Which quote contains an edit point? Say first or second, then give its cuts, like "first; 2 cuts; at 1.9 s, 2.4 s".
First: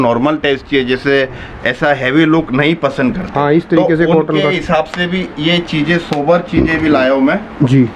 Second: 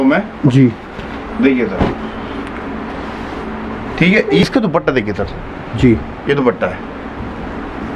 second; 1 cut; at 4.4 s